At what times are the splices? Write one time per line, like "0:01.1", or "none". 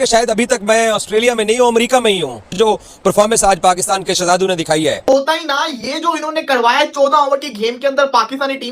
0:02.4
0:05.0